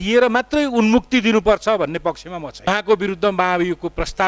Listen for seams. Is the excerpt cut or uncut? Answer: cut